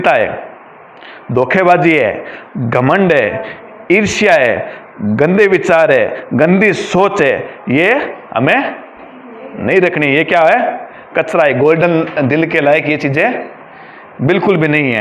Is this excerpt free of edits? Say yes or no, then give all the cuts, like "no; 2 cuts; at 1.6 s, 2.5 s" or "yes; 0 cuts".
yes; 0 cuts